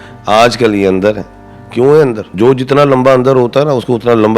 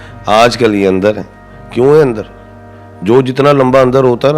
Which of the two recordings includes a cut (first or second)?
first